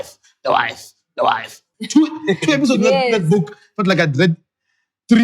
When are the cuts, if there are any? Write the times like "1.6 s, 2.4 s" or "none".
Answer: 1.6 s